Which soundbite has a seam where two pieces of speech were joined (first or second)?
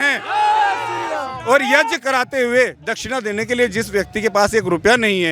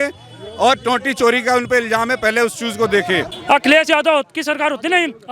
second